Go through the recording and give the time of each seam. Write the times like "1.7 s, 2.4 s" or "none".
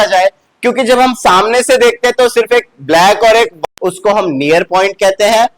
3.6 s